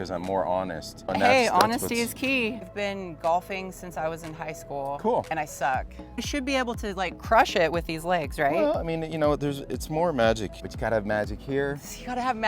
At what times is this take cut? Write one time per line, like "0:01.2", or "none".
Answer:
0:01.1
0:02.6
0:06.3
0:10.7